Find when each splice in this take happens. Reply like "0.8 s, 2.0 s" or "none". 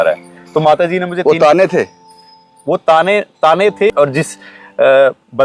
3.9 s